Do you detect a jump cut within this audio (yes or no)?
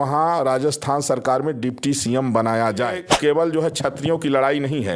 yes